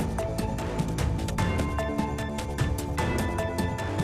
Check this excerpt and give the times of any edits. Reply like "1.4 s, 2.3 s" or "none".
1.3 s